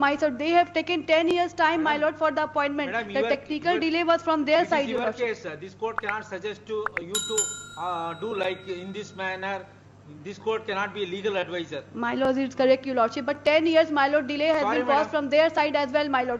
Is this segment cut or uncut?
uncut